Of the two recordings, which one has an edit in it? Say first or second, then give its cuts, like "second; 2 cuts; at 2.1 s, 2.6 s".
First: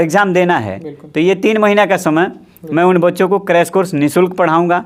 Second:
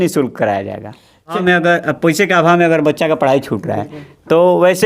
second; 1 cut; at 1.4 s